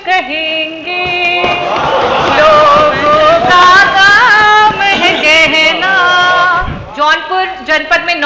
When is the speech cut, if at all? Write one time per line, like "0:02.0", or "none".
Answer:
0:06.8